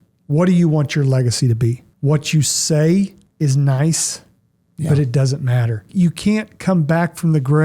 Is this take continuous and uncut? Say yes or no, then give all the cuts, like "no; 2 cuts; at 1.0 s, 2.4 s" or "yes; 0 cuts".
no; 3 cuts; at 1.9 s, 3.2 s, 5.9 s